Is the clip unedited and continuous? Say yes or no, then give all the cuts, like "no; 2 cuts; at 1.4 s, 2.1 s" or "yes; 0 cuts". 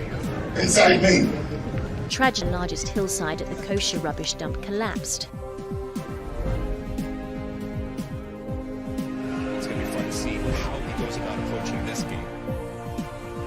no; 1 cut; at 2.4 s